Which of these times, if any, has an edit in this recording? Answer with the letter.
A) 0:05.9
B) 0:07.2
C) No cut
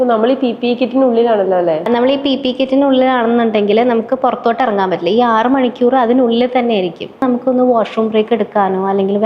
B